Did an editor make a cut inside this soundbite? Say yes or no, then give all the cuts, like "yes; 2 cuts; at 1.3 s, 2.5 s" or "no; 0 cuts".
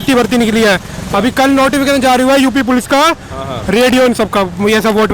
no; 0 cuts